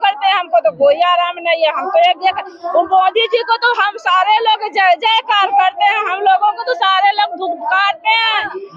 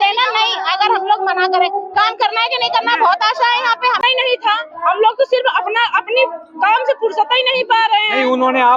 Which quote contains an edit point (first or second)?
second